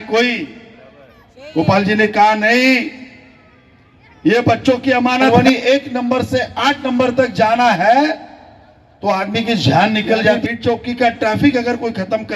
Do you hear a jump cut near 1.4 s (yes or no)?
no